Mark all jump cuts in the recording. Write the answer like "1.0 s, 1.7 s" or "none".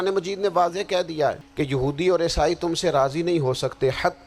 1.4 s

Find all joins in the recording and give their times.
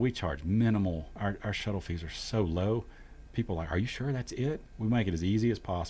1.1 s, 4.7 s

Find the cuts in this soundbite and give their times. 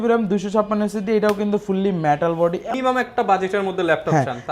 2.7 s

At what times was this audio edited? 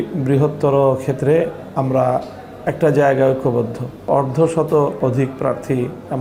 none

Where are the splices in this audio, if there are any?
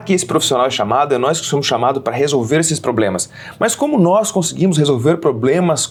none

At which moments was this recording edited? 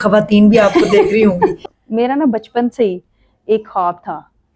1.6 s

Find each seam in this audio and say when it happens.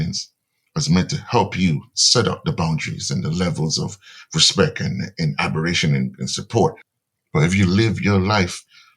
6.9 s

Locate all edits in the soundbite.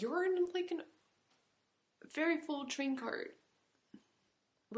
none

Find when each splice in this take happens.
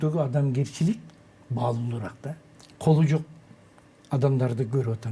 2.5 s

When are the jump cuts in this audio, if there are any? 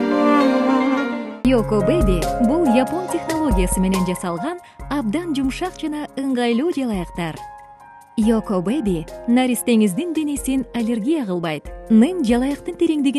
1.4 s

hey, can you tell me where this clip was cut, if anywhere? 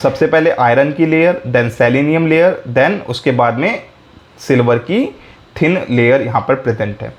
none

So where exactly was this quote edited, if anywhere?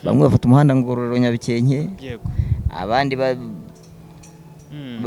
none

